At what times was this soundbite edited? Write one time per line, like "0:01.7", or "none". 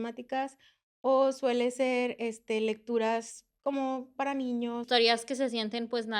0:04.9